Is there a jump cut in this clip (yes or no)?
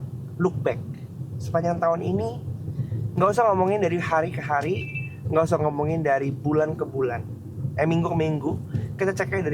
no